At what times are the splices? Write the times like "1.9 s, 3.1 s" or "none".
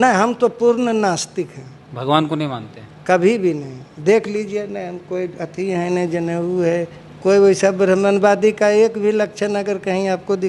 none